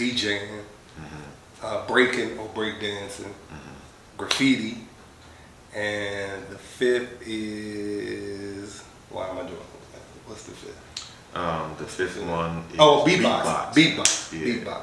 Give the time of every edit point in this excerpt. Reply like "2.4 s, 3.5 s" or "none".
none